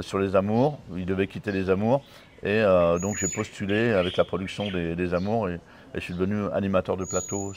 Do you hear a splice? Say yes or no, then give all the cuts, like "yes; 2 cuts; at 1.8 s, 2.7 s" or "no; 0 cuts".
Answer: no; 0 cuts